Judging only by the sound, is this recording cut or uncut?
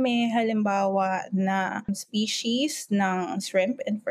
cut